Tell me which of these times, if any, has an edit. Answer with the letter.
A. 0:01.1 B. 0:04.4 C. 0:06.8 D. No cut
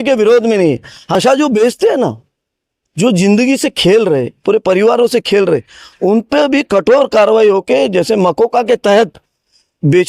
A